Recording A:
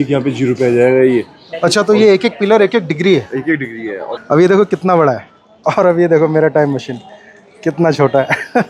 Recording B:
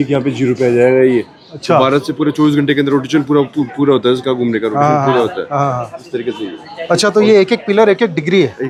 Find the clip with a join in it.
A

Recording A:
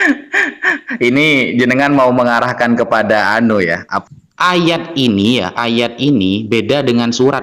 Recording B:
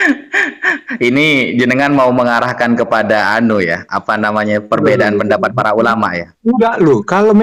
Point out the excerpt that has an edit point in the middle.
A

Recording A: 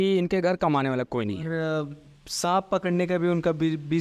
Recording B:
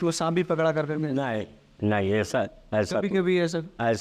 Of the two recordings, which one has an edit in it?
A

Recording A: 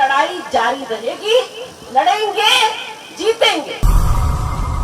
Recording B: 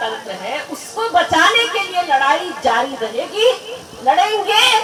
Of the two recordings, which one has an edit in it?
A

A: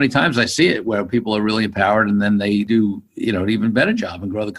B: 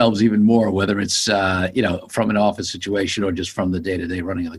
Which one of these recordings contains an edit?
A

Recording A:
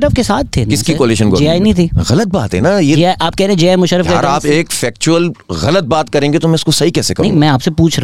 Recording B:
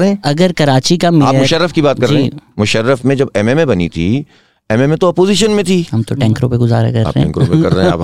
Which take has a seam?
B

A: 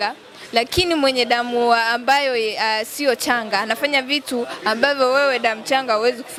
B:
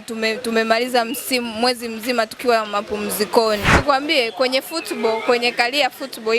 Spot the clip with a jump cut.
B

